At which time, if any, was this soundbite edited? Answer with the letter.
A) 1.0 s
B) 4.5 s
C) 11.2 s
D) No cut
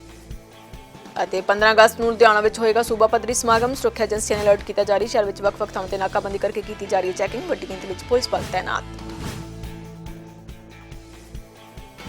A